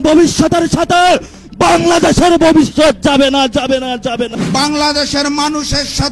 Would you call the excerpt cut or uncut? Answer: cut